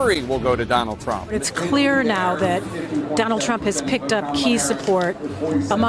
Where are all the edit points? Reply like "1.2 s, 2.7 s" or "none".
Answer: 1.5 s